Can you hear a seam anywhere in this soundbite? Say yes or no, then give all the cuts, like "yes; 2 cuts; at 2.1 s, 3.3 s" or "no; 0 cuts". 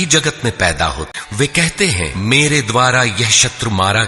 yes; 2 cuts; at 1.1 s, 2.1 s